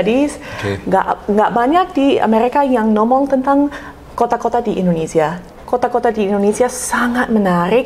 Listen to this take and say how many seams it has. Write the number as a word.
one